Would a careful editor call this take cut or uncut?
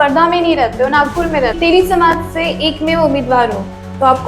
cut